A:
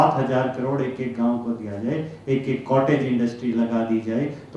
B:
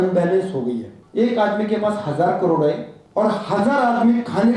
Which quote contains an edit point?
B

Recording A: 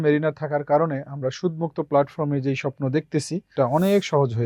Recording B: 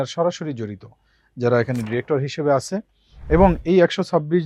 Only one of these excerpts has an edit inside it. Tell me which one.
A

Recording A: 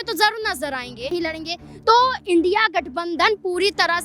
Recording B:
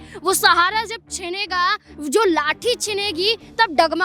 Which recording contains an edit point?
A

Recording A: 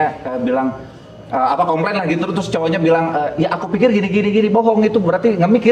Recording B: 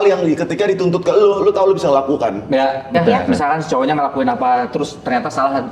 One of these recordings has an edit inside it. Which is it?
B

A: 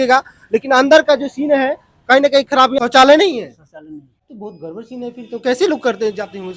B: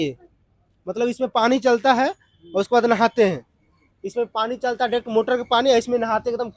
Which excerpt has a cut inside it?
A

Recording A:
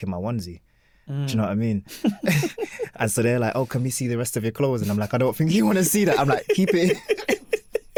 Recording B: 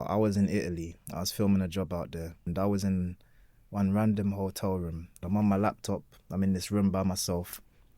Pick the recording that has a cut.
B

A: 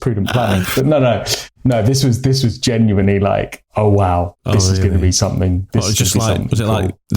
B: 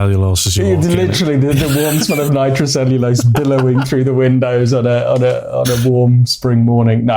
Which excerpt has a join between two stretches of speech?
A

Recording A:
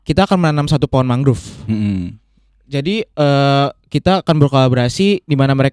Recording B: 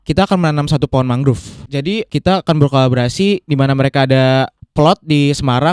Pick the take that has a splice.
B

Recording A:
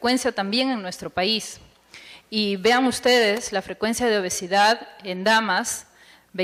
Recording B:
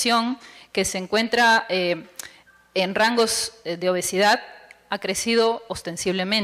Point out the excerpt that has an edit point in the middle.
B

